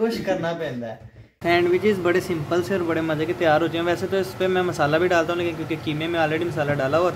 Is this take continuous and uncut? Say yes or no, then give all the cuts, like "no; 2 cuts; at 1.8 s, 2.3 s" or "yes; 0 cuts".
no; 1 cut; at 1.4 s